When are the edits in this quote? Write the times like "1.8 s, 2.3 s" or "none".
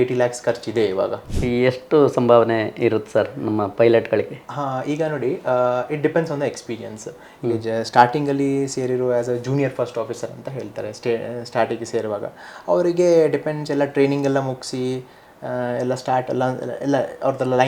1.3 s